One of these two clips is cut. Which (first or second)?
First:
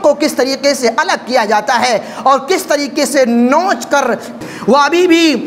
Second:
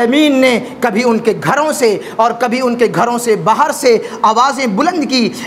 first